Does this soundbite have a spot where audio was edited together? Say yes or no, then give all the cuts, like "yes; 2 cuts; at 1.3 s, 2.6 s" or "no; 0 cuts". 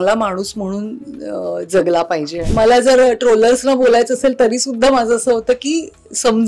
yes; 1 cut; at 2.4 s